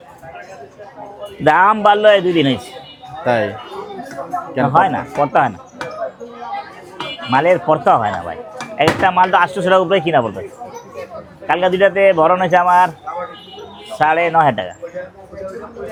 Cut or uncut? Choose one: uncut